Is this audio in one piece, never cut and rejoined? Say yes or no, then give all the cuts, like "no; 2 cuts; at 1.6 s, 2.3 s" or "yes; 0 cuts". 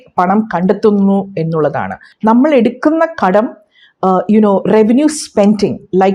no; 1 cut; at 2.0 s